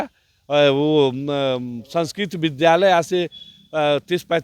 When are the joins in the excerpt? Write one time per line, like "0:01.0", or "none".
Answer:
none

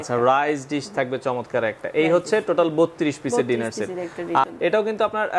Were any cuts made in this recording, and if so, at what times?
0:04.5

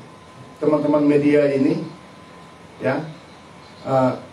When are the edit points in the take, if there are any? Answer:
none

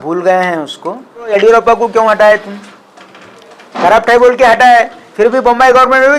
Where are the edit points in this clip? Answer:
0:01.3

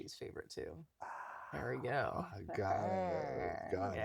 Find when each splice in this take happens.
none

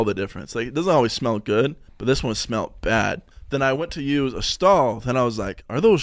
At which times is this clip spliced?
0:01.9
0:03.3

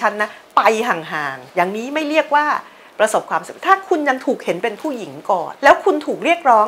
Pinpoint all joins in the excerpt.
0:01.4
0:05.5

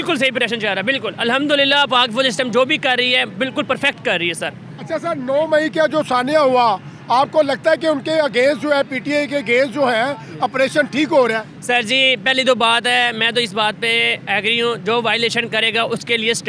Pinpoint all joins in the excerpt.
none

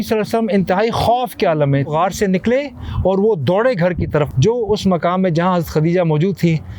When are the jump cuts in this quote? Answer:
0:01.9
0:04.3

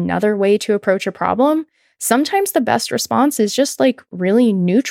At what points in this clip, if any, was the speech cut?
none

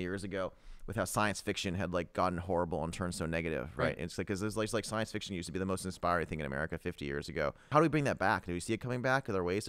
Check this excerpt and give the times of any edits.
none

